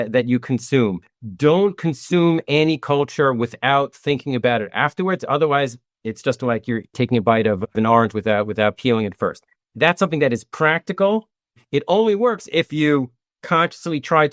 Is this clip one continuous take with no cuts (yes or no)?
no